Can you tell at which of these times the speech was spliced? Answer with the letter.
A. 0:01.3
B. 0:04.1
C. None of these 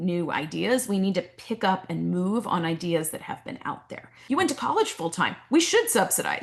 B